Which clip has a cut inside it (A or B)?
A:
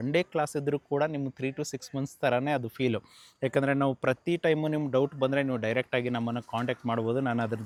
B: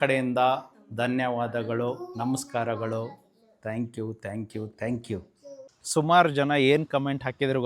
B